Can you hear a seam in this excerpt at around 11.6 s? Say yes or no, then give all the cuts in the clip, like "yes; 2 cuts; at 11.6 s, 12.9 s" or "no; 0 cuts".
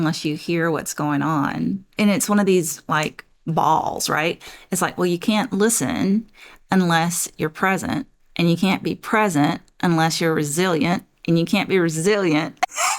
no; 1 cut; at 1.9 s